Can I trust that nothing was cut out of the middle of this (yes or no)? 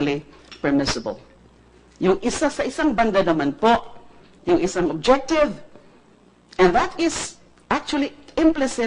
no